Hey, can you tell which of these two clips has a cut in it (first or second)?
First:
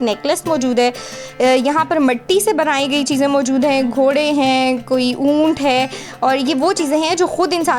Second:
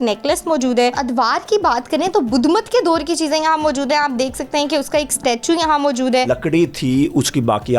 second